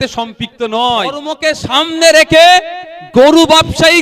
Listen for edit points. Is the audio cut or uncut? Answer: cut